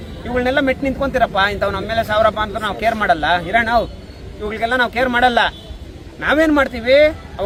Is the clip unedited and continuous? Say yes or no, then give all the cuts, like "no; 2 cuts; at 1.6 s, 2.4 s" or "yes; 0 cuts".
yes; 0 cuts